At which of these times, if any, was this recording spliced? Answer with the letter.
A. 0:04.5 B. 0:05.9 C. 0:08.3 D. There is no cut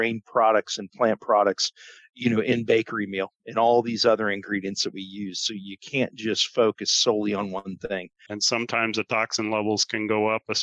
C